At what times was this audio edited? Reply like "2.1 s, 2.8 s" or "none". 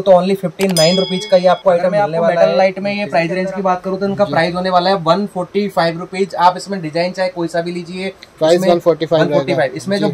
2.4 s

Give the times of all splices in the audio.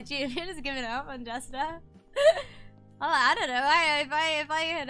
none

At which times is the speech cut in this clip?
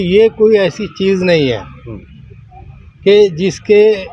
none

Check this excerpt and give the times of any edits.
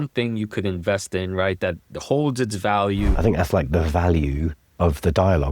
3.1 s, 4.6 s

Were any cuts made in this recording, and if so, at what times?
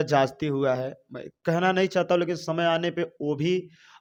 none

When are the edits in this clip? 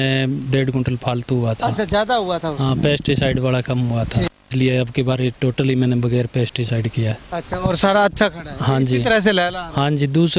4.5 s

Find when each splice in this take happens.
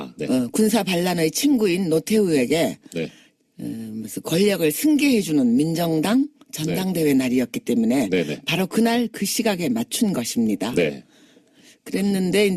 none

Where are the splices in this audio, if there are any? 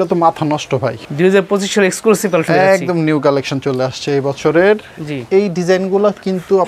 1.1 s

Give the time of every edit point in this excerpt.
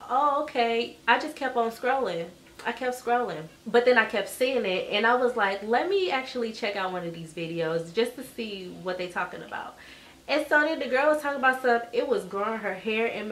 3.5 s

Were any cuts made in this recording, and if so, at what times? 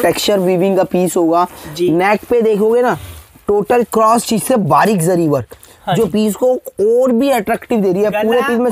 none

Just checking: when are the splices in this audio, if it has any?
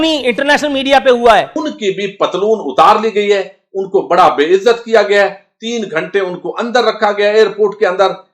1.8 s

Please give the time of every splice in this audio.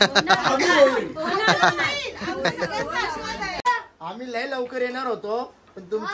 3.6 s

